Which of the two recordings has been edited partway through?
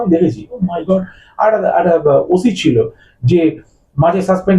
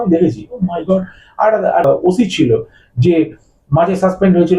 second; 1 cut; at 1.8 s

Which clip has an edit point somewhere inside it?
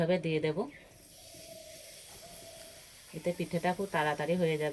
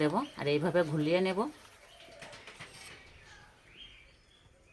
second; 1 cut; at 1.9 s

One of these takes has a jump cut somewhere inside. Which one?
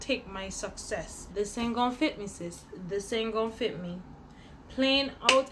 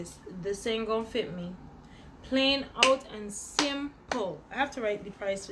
first; 1 cut; at 1.2 s

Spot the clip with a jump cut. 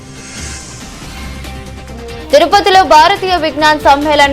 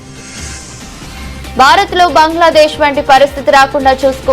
second; 1 cut; at 1.0 s

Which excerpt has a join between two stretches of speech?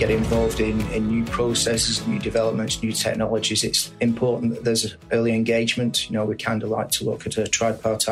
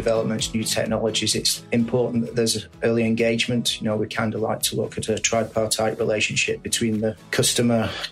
second; 1 cut; at 7.2 s

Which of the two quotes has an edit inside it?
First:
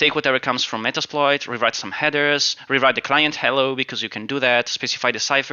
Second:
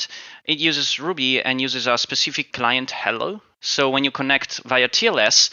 second; 2 cuts; at 2.5 s, 3.5 s

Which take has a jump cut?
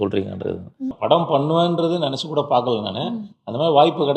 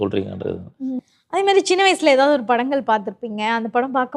first; 1 cut; at 0.9 s

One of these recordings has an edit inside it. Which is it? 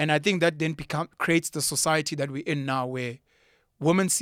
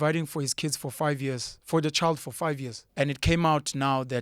second; 1 cut; at 2.8 s

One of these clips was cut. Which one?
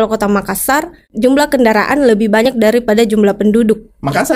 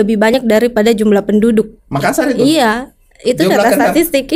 first; 1 cut; at 1.1 s

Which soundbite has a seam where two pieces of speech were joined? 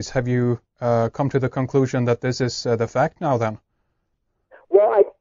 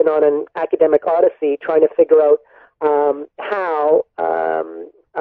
second; 1 cut; at 0.9 s

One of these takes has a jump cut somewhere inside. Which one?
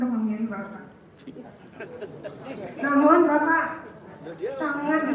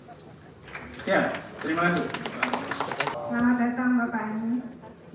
second; 1 cut; at 3.2 s

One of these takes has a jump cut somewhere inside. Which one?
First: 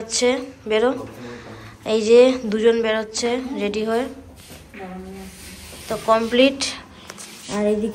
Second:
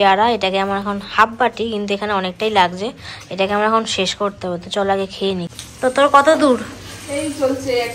second; 1 cut; at 5.5 s

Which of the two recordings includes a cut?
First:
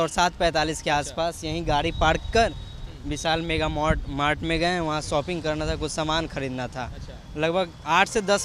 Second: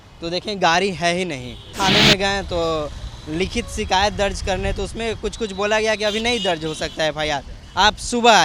second; 1 cut; at 1.7 s

